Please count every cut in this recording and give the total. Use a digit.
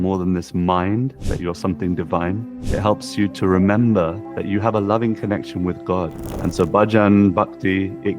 4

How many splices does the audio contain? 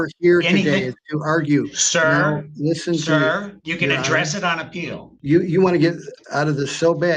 1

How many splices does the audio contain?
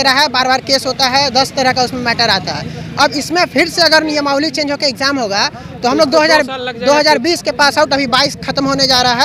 0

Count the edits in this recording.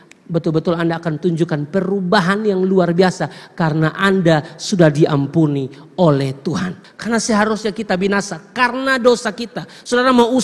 1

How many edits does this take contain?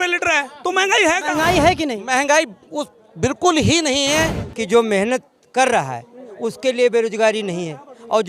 2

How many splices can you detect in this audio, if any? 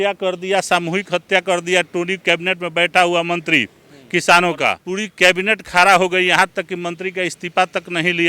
1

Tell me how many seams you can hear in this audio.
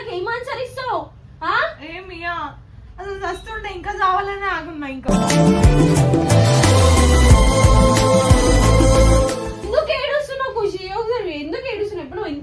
1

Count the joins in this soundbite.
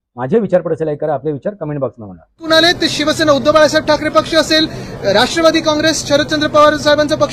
1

